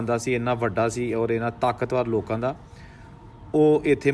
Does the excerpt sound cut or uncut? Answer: uncut